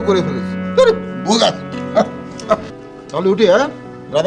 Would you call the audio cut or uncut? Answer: cut